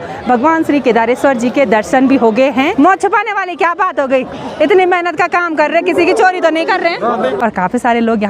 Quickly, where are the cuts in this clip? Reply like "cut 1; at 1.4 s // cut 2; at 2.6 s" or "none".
cut 1; at 2.7 s // cut 2; at 7.3 s